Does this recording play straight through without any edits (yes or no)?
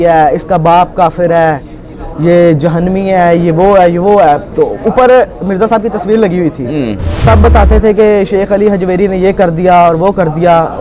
no